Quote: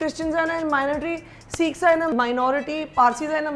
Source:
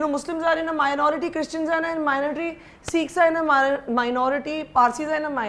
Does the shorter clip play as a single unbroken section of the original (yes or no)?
no